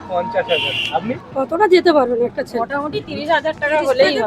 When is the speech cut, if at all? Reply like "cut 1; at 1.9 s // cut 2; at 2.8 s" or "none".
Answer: cut 1; at 1.2 s